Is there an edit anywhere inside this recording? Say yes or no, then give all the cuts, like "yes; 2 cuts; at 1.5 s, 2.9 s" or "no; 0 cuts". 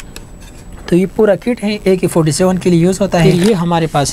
yes; 1 cut; at 3.2 s